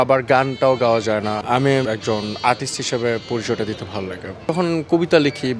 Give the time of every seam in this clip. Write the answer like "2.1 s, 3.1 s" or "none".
1.8 s, 4.4 s